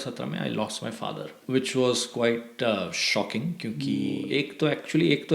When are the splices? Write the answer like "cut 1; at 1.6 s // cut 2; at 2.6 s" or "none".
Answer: cut 1; at 1.4 s // cut 2; at 4.2 s